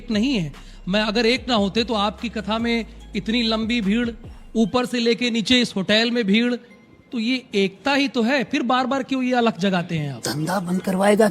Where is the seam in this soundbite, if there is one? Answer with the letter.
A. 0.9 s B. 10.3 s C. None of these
B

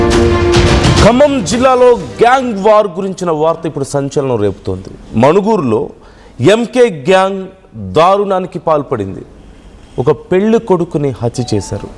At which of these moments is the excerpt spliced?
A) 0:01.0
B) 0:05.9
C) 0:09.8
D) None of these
A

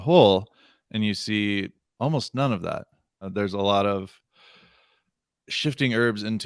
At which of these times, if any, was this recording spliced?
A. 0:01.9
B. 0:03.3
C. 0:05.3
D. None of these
B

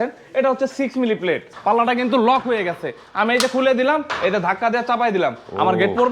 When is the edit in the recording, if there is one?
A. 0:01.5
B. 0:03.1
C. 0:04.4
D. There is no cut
A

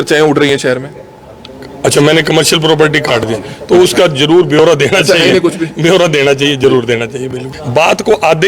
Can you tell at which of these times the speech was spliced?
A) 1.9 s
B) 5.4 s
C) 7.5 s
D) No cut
C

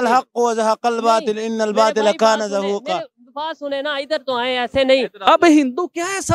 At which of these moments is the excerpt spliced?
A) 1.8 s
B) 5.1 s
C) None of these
B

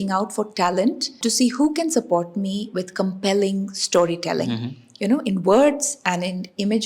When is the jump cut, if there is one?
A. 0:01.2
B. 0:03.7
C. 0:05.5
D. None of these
A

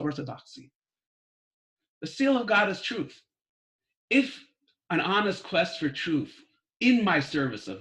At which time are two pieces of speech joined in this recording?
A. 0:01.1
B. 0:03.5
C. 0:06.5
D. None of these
D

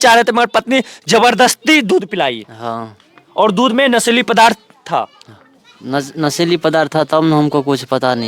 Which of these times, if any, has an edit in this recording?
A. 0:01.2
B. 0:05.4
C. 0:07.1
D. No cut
D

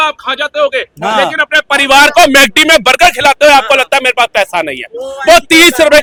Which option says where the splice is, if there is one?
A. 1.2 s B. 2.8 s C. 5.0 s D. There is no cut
D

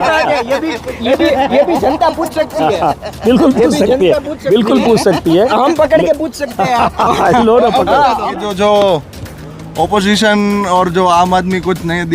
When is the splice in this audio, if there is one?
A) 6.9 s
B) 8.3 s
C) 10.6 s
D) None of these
B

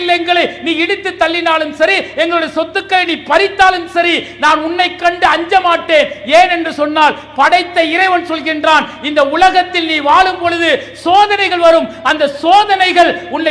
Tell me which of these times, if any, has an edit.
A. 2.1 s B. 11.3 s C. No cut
C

